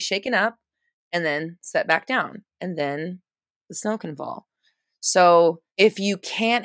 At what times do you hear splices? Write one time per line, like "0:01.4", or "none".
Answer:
0:02.5
0:05.6